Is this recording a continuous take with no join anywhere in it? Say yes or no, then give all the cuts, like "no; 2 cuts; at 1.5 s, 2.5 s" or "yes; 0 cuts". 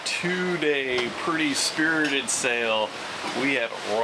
yes; 0 cuts